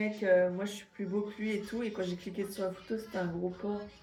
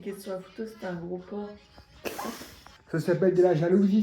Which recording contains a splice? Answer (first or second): second